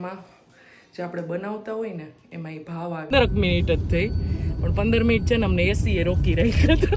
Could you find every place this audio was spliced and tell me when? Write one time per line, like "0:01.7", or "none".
0:03.1